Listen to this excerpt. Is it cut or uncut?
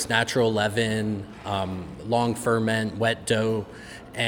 uncut